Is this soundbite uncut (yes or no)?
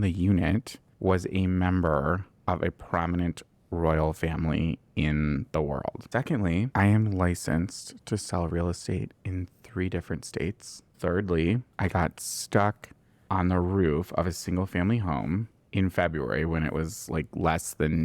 no